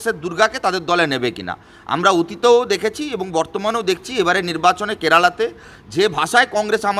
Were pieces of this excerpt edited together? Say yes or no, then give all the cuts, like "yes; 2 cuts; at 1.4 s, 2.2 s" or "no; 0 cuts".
no; 0 cuts